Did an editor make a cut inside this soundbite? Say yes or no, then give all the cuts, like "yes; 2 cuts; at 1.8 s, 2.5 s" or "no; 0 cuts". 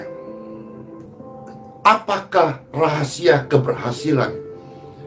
yes; 1 cut; at 1.1 s